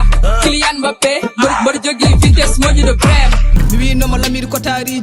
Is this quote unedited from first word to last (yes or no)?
no